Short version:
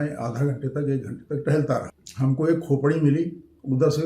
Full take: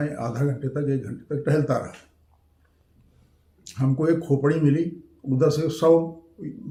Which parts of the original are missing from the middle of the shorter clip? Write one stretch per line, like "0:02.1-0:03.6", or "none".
0:02.0-0:03.6

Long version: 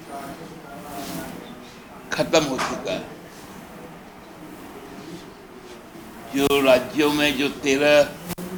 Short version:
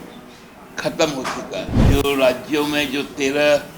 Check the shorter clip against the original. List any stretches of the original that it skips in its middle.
0:03.1-0:06.2

